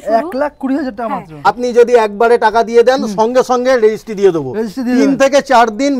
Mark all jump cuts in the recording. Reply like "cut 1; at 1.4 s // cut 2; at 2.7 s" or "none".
cut 1; at 1.5 s